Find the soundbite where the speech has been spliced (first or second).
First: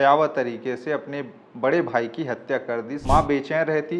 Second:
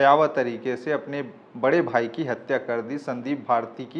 first